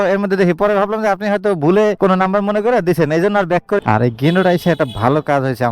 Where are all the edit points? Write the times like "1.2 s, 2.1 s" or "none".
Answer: 3.8 s